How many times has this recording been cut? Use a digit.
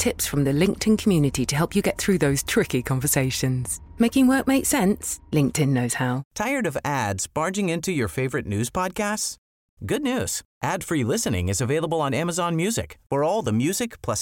1